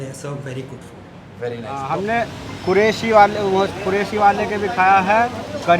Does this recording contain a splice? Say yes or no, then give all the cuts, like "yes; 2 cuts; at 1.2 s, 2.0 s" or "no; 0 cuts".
yes; 1 cut; at 1.8 s